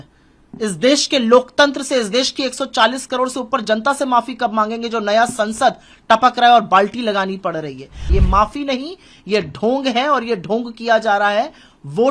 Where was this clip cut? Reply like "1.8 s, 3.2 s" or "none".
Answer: 8.0 s